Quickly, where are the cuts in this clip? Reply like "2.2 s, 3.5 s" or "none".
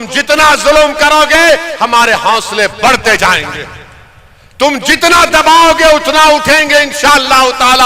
none